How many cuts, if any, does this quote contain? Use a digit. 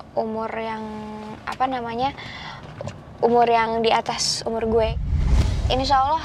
1